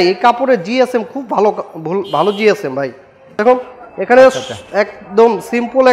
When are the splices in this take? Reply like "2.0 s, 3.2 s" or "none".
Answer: 3.4 s